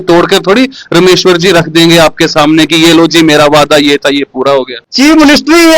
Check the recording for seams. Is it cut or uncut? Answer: cut